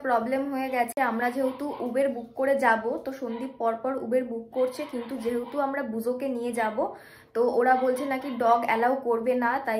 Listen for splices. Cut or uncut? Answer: uncut